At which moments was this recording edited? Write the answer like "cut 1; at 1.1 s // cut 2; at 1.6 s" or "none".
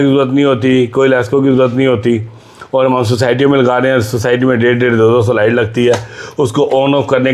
none